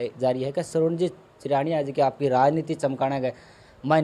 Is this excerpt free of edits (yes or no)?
yes